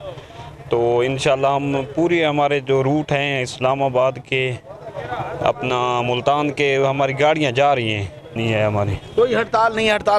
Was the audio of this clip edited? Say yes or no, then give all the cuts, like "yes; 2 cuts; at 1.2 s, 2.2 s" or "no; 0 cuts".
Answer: yes; 1 cut; at 8.4 s